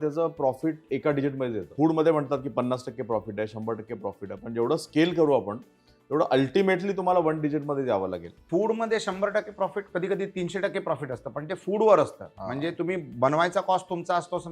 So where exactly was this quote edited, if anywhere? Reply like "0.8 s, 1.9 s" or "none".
1.6 s, 8.3 s